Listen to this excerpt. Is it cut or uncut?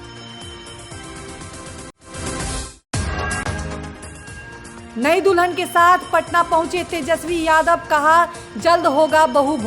cut